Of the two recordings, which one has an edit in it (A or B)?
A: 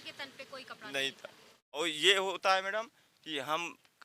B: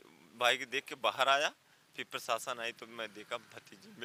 A